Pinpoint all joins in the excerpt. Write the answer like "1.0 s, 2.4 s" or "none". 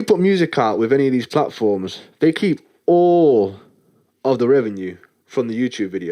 none